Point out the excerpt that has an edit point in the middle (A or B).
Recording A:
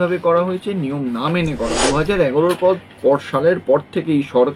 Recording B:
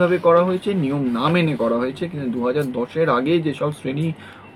A